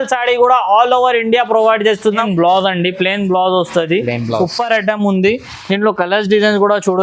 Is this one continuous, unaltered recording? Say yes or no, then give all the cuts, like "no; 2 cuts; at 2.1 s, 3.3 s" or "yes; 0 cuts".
no; 1 cut; at 2.2 s